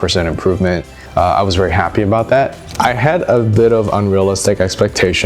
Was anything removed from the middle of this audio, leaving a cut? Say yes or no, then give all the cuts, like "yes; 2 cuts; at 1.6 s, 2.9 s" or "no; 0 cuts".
yes; 2 cuts; at 1.0 s, 2.6 s